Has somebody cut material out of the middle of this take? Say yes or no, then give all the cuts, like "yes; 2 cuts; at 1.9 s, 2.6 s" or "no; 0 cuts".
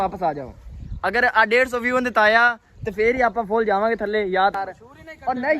yes; 1 cut; at 4.5 s